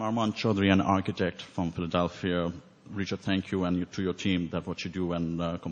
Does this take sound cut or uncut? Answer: uncut